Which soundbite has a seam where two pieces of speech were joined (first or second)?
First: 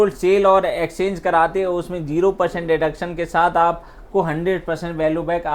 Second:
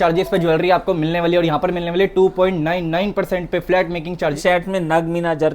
second